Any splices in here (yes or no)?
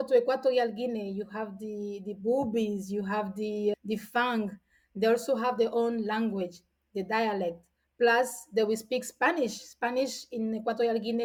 no